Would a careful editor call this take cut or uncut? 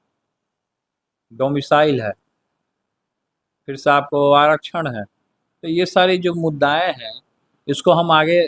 uncut